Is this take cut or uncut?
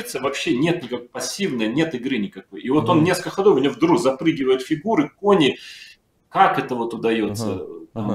uncut